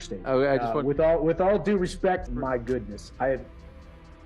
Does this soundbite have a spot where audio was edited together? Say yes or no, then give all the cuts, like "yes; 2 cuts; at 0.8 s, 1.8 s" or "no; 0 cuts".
yes; 1 cut; at 2.2 s